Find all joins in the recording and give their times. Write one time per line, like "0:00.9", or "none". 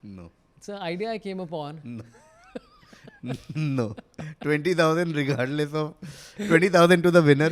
none